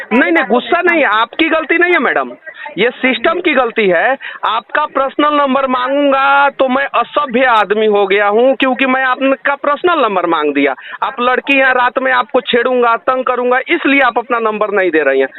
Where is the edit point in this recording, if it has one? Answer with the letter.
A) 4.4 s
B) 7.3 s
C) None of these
C